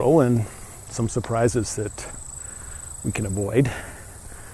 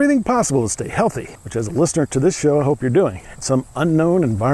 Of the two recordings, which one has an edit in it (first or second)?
second